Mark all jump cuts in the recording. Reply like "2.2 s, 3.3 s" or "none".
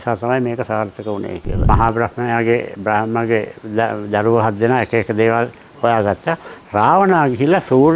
1.7 s